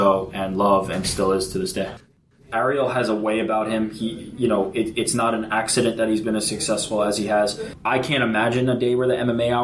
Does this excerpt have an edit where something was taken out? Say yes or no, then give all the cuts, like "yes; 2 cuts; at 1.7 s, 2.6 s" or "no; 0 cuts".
yes; 2 cuts; at 2.1 s, 7.7 s